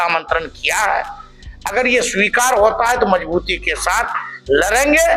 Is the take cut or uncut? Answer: uncut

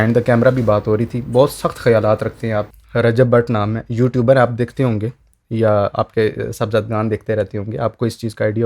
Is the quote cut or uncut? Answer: cut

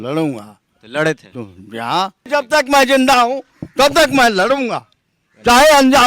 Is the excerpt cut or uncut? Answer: cut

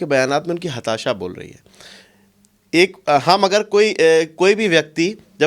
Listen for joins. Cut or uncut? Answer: uncut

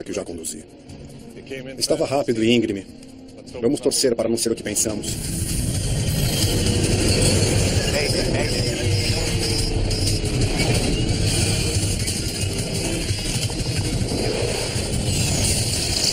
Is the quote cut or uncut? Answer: cut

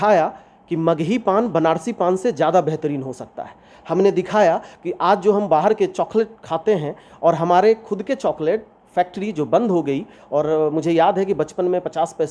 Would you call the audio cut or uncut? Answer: uncut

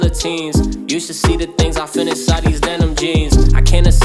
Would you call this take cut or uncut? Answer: uncut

